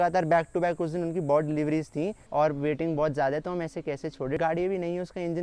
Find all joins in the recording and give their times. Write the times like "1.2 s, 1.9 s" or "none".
2.2 s, 4.4 s